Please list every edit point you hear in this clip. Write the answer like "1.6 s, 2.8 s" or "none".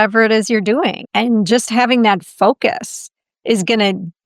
1.0 s